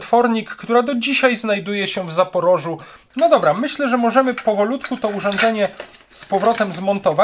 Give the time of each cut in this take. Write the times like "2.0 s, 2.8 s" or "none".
2.9 s